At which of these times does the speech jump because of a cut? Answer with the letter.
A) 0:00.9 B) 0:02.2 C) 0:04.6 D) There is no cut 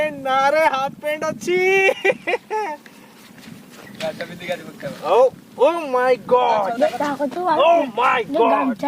D